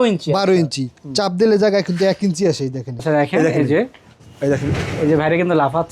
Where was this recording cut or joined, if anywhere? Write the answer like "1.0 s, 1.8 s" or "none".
3.0 s